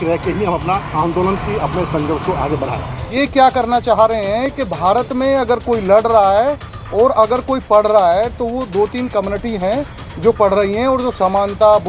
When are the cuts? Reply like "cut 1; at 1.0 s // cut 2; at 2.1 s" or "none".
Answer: cut 1; at 3.0 s